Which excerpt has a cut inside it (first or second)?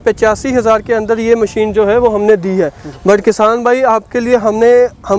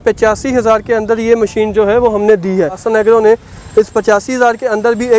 second